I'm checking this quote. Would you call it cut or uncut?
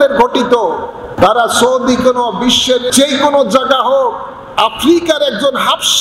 cut